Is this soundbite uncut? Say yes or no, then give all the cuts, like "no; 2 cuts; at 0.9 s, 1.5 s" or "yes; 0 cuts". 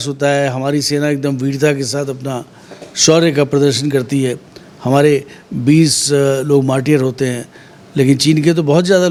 yes; 0 cuts